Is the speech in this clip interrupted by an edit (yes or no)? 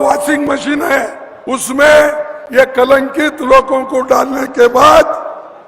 yes